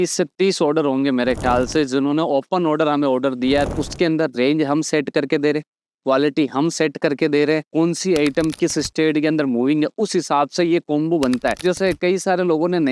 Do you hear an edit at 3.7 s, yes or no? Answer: yes